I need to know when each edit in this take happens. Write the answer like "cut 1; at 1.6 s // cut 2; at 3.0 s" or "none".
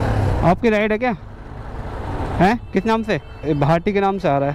cut 1; at 3.4 s